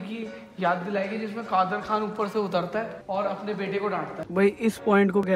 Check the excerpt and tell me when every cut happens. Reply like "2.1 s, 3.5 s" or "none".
3.0 s, 4.2 s